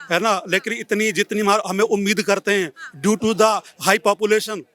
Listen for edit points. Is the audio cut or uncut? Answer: uncut